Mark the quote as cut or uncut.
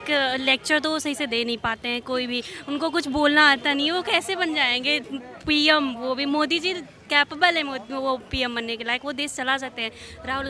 uncut